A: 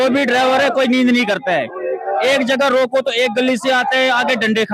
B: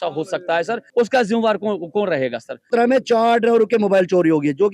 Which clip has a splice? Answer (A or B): B